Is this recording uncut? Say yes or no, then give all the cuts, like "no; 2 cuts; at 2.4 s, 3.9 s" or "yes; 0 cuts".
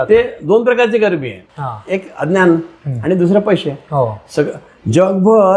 yes; 0 cuts